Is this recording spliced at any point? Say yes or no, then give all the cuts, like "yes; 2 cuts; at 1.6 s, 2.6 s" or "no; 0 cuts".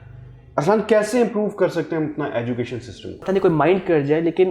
yes; 1 cut; at 3.2 s